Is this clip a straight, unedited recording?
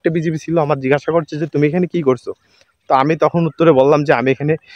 yes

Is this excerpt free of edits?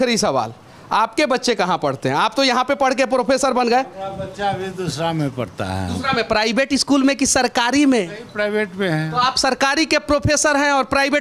yes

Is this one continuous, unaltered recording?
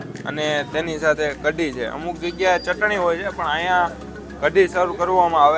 yes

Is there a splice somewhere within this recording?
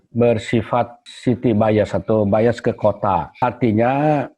yes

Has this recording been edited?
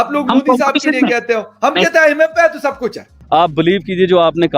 yes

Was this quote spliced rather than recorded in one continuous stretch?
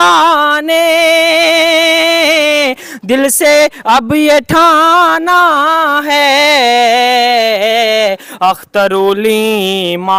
no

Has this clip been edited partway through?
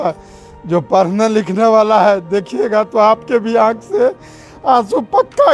no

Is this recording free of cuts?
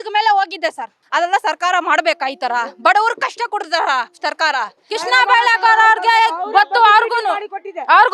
no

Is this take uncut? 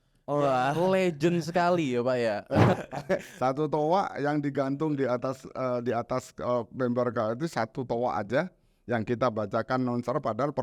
no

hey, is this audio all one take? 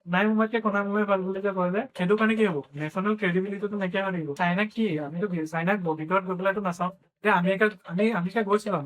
no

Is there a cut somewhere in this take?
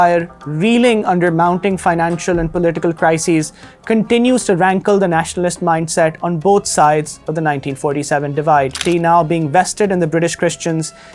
yes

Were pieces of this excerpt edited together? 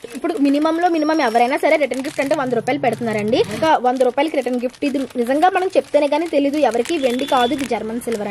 yes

